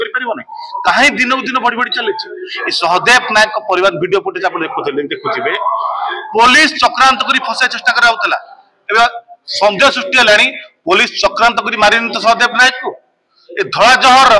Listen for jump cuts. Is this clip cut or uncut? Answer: uncut